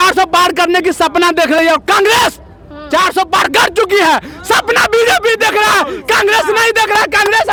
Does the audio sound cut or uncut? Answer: uncut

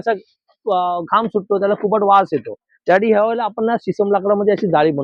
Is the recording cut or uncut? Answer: uncut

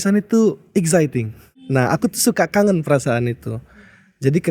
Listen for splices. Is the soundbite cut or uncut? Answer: cut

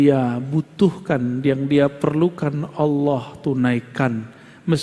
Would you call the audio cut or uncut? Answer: uncut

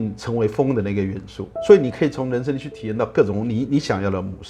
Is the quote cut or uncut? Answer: uncut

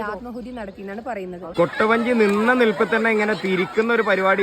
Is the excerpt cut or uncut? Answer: cut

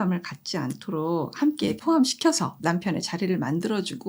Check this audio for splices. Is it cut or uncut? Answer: uncut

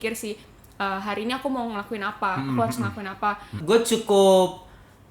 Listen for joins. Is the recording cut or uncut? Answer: cut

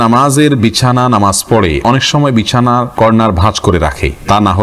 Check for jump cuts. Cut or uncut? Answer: uncut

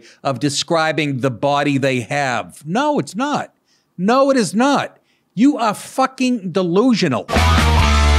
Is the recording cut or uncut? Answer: cut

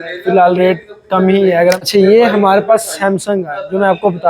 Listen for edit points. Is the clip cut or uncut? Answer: cut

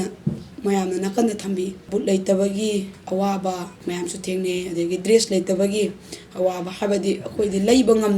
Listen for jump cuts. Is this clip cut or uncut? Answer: cut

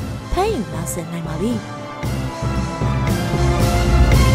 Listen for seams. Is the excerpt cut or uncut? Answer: cut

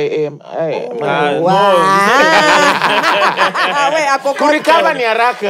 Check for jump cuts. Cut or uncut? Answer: uncut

